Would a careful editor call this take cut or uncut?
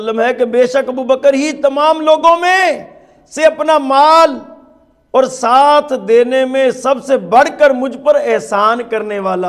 uncut